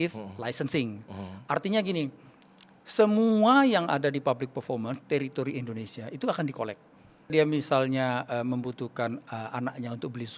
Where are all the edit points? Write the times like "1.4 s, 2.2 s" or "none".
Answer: 7.3 s

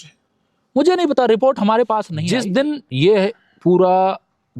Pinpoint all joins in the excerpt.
2.1 s

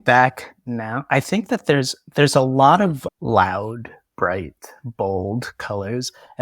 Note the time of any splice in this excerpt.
1.0 s, 3.0 s

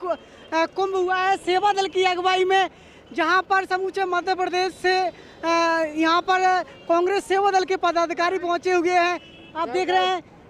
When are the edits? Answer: none

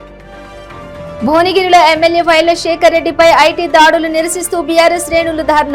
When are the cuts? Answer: 1.0 s

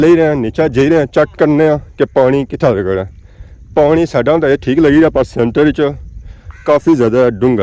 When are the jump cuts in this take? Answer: none

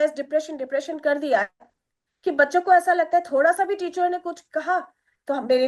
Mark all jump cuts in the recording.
none

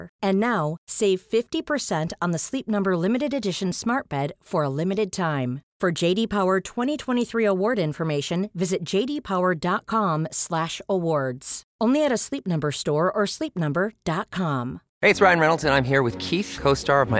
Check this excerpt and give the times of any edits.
14.8 s

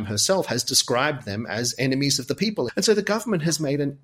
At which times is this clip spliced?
2.7 s

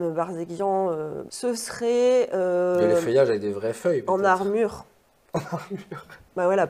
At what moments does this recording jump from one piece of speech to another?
1.2 s

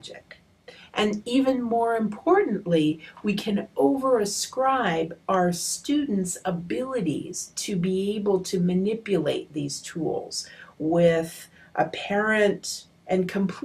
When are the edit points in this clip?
9.2 s

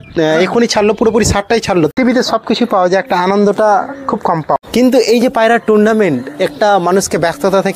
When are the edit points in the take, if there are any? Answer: 1.9 s, 4.6 s

